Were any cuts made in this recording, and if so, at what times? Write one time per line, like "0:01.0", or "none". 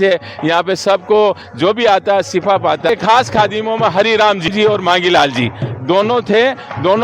0:02.9
0:04.5